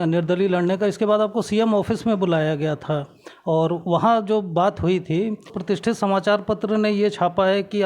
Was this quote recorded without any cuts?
no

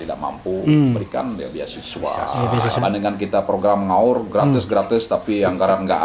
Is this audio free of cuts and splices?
no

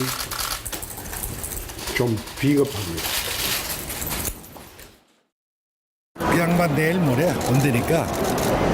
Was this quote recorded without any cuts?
no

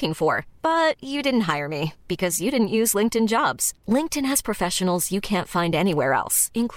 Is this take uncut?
yes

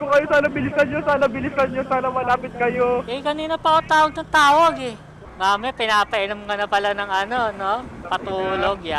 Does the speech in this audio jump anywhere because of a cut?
yes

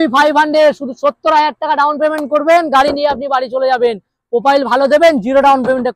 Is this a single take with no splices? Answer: yes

